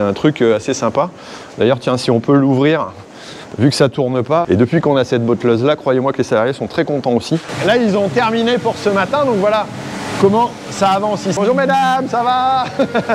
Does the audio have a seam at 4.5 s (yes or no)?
yes